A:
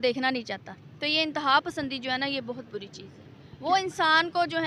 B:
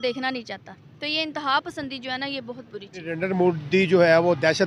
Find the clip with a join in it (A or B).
B